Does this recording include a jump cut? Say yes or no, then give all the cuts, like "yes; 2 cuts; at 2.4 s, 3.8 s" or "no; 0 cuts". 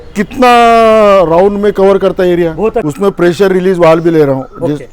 yes; 1 cut; at 2.8 s